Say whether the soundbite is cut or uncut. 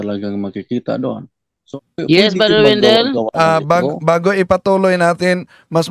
cut